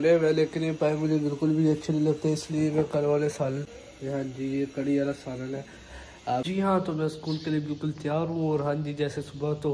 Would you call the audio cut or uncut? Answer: cut